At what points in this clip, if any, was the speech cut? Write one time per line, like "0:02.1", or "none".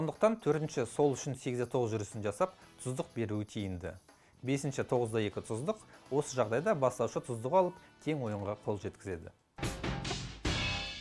0:09.4